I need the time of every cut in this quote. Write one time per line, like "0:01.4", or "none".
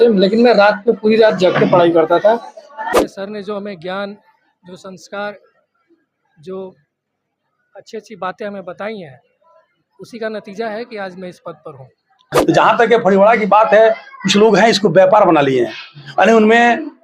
0:02.9
0:12.3

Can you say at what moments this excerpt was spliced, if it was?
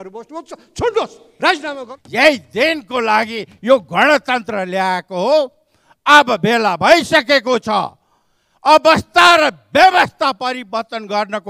0:01.9

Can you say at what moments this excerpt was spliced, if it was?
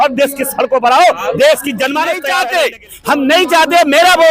0:02.3

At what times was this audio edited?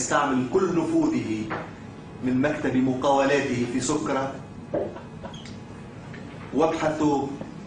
none

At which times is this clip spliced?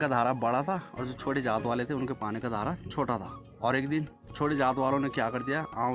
0:03.4

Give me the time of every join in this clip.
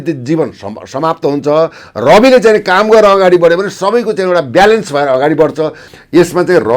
0:05.9

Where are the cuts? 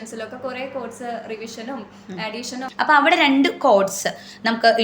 0:02.6

